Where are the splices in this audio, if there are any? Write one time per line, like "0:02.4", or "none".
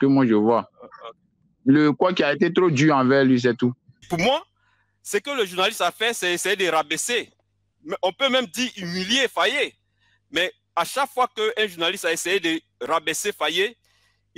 0:01.3
0:04.1

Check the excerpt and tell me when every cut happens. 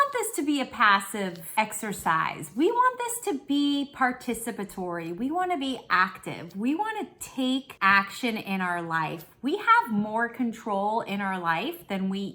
0:01.4
0:07.7

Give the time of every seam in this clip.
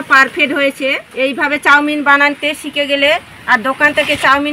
0:01.0

